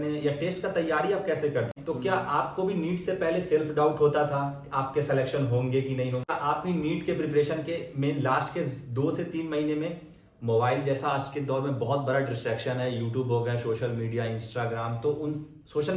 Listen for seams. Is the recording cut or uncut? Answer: cut